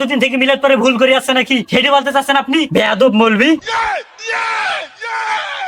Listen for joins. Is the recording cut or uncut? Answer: uncut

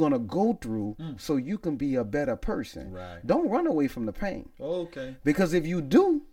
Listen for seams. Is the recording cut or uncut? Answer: uncut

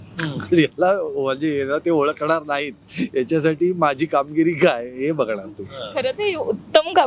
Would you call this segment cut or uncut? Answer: uncut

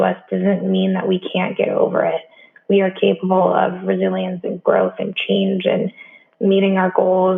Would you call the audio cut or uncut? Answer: uncut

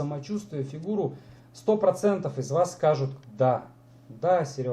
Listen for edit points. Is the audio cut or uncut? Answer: uncut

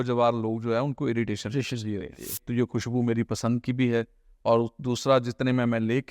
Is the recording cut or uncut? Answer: cut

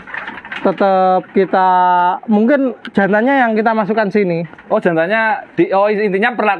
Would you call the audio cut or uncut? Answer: uncut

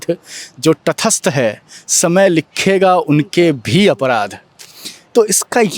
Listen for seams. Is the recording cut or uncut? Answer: uncut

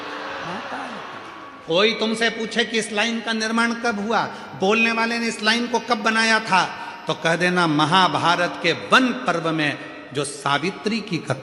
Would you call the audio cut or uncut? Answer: uncut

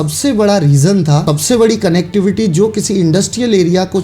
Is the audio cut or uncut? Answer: cut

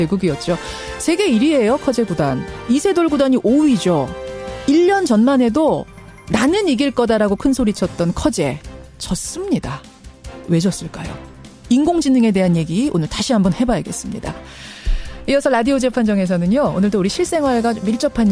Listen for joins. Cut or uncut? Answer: uncut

